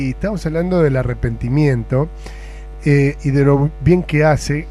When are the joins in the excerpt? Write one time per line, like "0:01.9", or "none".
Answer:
none